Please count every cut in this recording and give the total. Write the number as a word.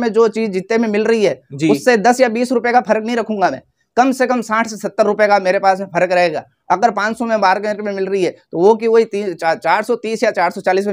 zero